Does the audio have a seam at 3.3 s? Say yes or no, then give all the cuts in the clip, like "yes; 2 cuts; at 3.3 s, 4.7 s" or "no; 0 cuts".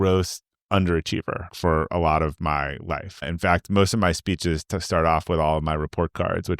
yes; 2 cuts; at 1.5 s, 3.3 s